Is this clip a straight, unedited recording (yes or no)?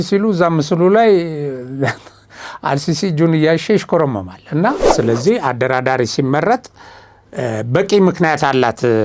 no